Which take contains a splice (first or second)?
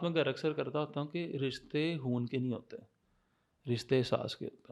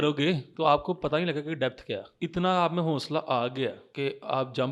second